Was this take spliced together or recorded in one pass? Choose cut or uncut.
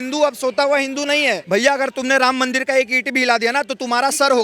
cut